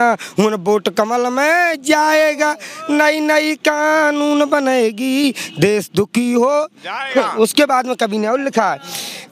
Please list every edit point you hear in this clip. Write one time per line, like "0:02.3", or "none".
none